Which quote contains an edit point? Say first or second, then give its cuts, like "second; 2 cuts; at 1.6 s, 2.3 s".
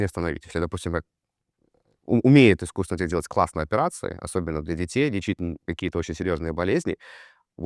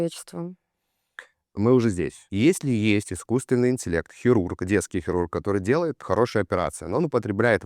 second; 1 cut; at 2.2 s